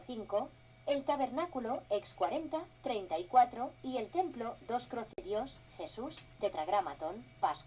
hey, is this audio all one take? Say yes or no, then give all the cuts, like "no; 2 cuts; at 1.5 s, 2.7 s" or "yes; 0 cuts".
no; 1 cut; at 5.2 s